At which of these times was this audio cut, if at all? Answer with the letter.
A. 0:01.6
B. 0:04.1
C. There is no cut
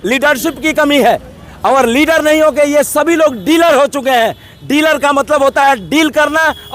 C